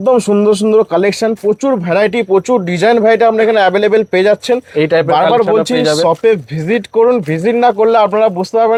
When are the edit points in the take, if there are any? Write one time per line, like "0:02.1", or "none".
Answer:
none